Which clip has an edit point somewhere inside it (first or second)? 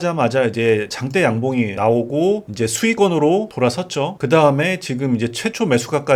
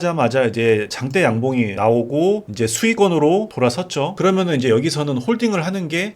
second